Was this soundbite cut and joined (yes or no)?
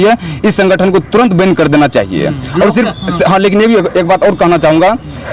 no